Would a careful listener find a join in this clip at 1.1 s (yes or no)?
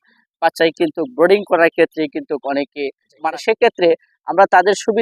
no